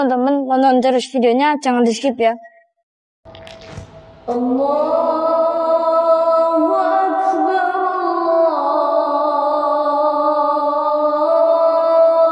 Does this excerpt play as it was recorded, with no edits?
no; 1 cut; at 3.2 s

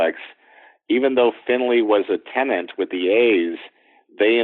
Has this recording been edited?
no; 0 cuts

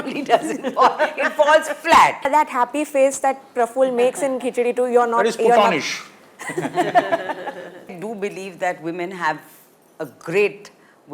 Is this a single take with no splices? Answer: no; 2 cuts; at 2.3 s, 7.9 s

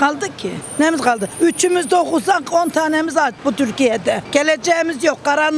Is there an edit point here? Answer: no; 0 cuts

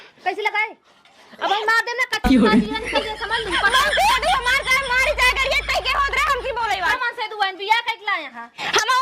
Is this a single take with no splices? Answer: no; 1 cut; at 7.0 s

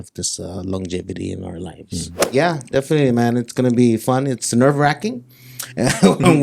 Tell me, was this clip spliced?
yes; 1 cut; at 2.3 s

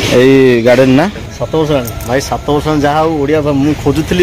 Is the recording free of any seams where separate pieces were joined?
no; 1 cut; at 1.2 s

